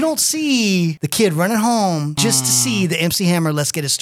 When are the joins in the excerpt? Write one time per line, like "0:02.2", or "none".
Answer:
0:01.0
0:02.2